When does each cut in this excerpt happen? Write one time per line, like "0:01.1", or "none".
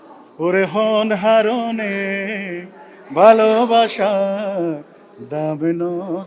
none